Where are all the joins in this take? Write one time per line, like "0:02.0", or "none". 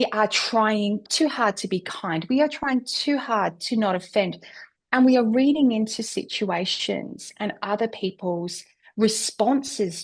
0:01.1